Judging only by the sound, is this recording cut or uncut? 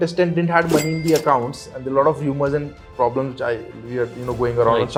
uncut